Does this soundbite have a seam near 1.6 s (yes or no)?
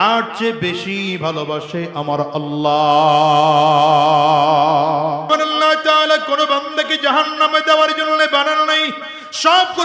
no